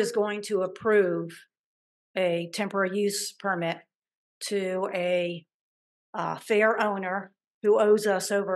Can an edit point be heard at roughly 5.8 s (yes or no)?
no